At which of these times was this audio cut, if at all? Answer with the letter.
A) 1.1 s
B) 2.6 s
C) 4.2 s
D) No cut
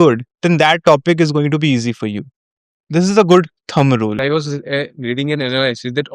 C